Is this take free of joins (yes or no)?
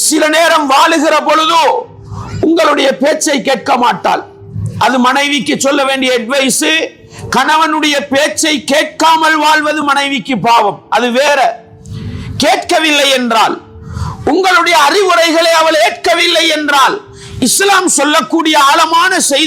yes